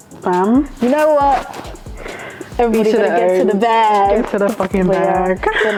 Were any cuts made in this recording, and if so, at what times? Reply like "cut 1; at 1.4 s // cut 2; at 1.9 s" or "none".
none